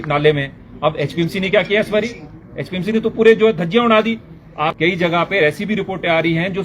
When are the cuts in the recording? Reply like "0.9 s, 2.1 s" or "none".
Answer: 4.8 s

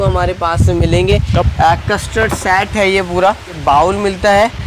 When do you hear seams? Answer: 1.5 s, 3.5 s

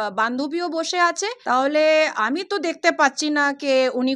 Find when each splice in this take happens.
1.3 s

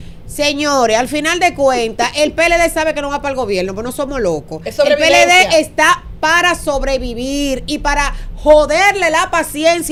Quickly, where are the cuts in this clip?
none

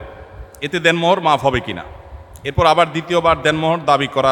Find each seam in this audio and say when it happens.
none

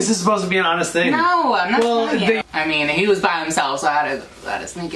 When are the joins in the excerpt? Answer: 2.5 s

